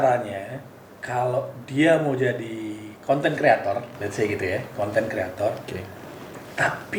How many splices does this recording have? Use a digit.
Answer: 0